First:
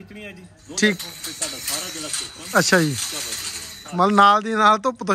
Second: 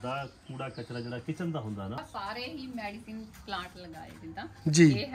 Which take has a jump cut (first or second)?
second